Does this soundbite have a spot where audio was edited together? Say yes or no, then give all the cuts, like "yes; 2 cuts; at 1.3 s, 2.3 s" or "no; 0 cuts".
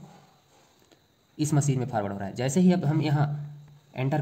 no; 0 cuts